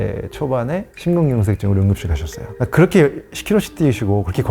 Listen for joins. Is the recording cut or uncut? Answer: cut